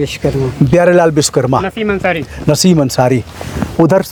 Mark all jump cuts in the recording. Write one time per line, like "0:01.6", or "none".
none